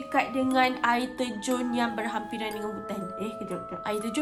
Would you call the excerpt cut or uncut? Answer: uncut